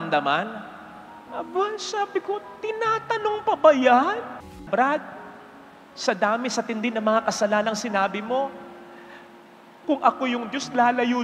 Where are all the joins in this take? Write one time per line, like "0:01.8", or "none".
0:04.5